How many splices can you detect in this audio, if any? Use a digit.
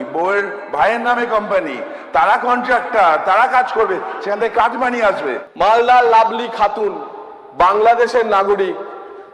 1